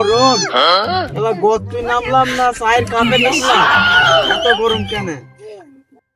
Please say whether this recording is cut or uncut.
uncut